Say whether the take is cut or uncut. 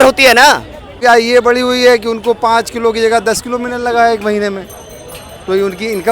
cut